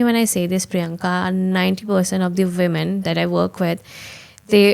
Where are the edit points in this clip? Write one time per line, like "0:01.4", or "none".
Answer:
none